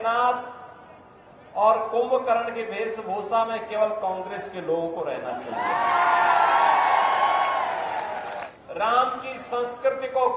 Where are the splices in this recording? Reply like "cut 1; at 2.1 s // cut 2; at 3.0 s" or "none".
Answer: cut 1; at 8.5 s